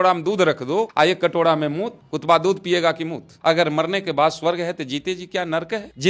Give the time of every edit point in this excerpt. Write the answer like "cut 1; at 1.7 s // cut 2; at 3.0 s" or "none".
cut 1; at 0.9 s // cut 2; at 3.4 s